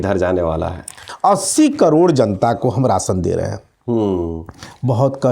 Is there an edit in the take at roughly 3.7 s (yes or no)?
no